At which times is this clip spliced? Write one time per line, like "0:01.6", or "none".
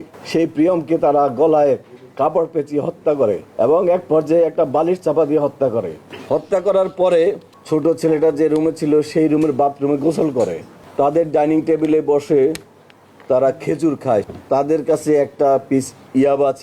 0:03.5
0:07.5
0:10.8
0:14.3